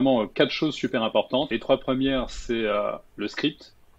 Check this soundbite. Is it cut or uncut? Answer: cut